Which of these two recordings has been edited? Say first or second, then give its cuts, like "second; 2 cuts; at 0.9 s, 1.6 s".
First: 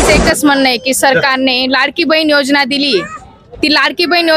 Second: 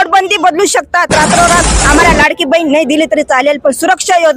second; 1 cut; at 1.8 s